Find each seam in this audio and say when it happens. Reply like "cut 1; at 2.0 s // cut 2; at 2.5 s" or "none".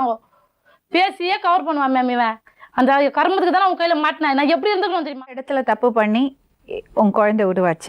cut 1; at 5.4 s

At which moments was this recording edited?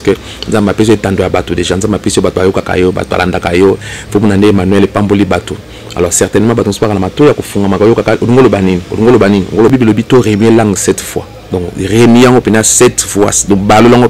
cut 1; at 9.7 s

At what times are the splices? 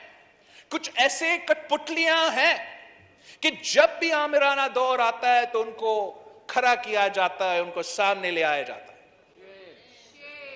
none

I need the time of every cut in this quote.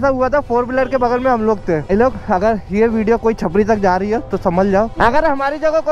cut 1; at 1.9 s // cut 2; at 4.9 s

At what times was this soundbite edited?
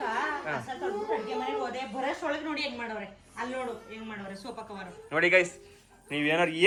none

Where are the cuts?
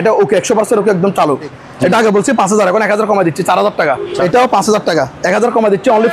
cut 1; at 1.6 s // cut 2; at 4.1 s

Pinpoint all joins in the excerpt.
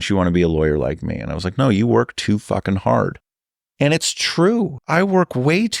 cut 1; at 4.9 s

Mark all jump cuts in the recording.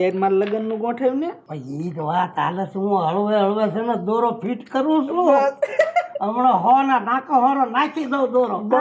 none

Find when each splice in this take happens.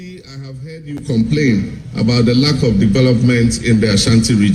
none

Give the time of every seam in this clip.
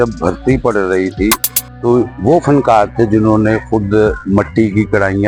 none

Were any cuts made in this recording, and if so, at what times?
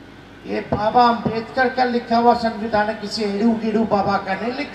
none

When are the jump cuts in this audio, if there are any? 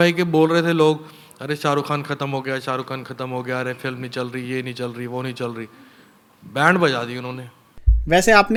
none

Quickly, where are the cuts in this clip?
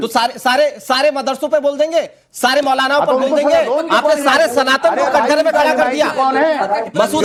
none

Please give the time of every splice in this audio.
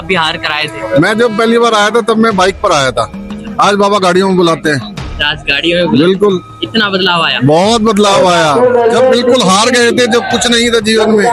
none

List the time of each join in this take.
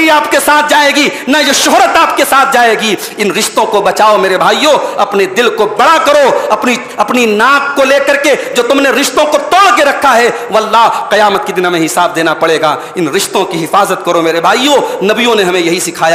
none

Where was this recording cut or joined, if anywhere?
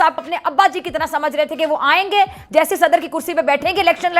none

